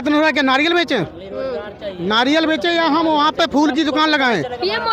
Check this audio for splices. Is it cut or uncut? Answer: uncut